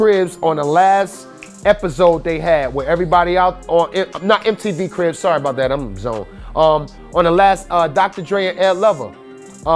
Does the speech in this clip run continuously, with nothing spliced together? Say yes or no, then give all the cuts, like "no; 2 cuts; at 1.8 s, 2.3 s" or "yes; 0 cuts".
yes; 0 cuts